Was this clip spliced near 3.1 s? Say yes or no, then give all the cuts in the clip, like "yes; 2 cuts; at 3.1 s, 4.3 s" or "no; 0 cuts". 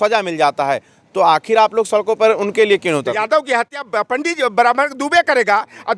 yes; 1 cut; at 3.1 s